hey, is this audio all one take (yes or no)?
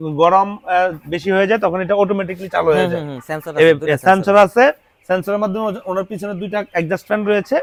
yes